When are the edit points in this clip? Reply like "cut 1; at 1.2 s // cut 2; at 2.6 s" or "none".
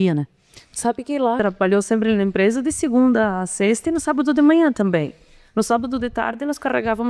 cut 1; at 1.4 s